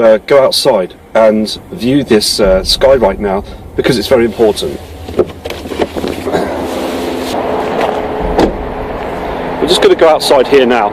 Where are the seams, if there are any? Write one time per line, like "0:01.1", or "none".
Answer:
0:10.0